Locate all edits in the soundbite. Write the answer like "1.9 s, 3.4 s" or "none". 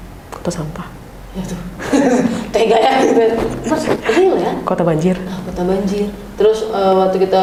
none